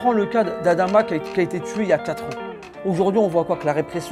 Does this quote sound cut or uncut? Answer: uncut